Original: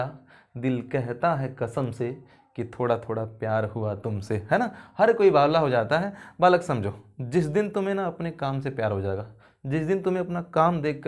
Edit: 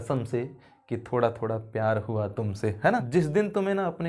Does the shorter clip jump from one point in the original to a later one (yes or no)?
yes